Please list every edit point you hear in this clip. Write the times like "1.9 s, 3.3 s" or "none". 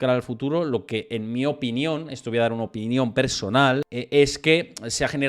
3.9 s